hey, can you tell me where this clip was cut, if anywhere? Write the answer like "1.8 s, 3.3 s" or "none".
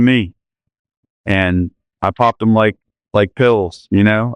none